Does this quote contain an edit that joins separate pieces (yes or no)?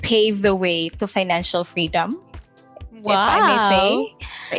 no